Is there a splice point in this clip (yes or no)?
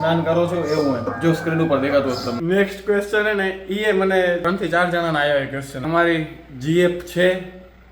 yes